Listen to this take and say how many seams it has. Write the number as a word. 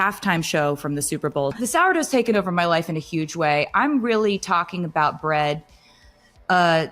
one